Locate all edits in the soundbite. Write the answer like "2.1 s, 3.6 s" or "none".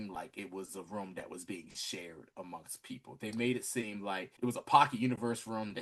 4.3 s